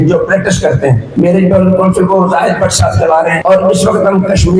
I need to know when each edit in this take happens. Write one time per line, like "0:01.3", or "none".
none